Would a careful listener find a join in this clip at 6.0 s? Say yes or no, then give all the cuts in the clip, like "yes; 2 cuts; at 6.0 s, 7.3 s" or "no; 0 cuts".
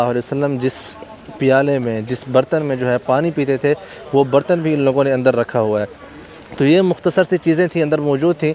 no; 0 cuts